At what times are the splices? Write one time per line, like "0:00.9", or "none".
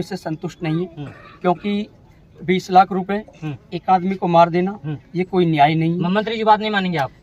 none